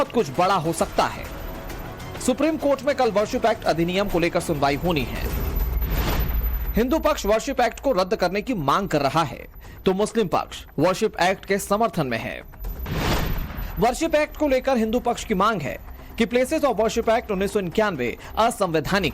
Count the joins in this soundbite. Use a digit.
1